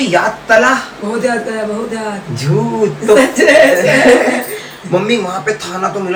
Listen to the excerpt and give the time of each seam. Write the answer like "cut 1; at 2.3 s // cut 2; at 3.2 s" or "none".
none